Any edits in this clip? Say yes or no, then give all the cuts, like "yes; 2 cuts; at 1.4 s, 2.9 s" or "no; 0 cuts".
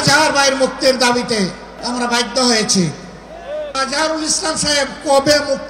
yes; 2 cuts; at 1.7 s, 3.8 s